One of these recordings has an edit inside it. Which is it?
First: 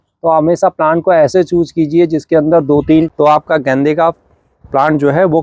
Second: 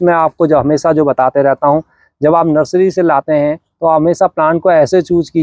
first; 1 cut; at 3.1 s

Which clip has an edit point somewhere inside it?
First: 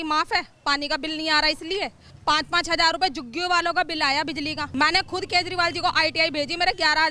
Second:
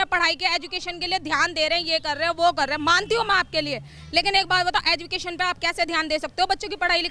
first; 2 cuts; at 2.1 s, 4.7 s

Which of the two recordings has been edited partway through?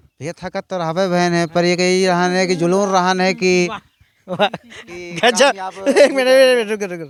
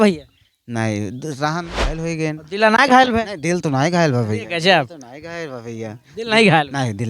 second; 1 cut; at 1.6 s

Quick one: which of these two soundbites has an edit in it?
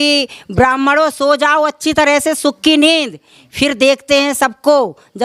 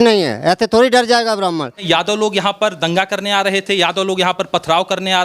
second; 1 cut; at 1.8 s

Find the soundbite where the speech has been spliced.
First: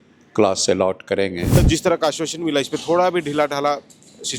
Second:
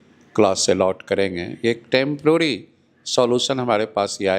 first; 1 cut; at 1.6 s

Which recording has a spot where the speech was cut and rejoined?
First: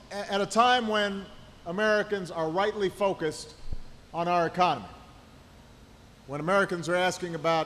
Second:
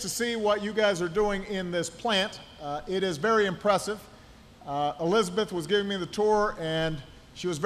second; 1 cut; at 1.9 s

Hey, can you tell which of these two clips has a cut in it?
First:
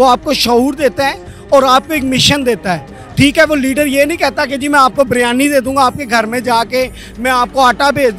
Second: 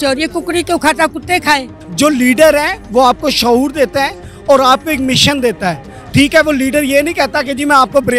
second; 1 cut; at 1.8 s

